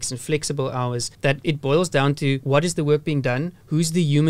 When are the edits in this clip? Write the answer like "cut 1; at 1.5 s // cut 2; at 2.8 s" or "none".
none